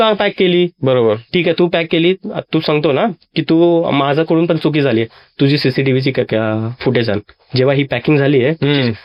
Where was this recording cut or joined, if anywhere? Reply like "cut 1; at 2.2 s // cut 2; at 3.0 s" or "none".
none